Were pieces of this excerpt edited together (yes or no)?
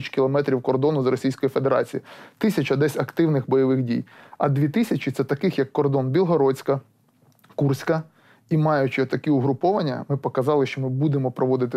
no